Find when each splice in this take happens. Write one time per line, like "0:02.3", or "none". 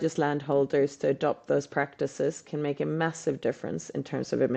none